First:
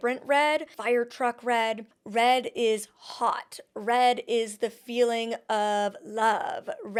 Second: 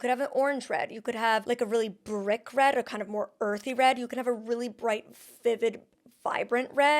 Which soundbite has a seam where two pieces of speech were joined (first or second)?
second